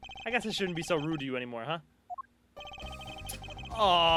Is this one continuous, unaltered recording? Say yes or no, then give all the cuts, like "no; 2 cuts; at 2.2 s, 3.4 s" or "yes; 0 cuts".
yes; 0 cuts